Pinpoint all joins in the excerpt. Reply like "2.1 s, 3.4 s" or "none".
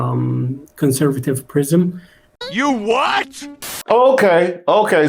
2.3 s